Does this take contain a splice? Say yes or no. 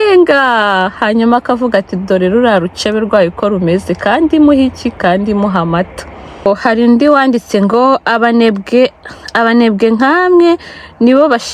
yes